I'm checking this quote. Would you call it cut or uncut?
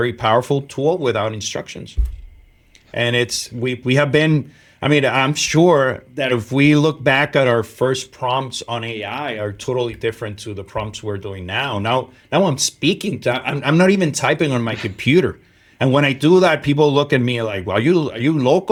uncut